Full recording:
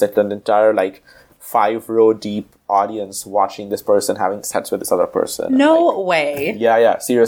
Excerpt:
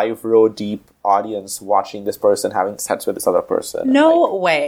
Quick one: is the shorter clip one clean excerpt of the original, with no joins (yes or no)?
yes